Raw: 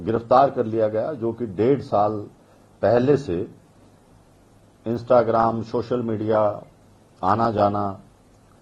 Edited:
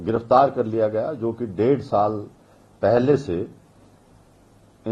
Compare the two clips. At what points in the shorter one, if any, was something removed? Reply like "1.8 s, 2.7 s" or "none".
none